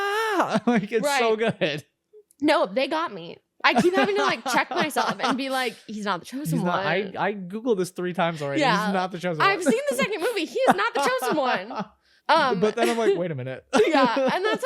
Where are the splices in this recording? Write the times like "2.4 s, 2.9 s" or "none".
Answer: 12.1 s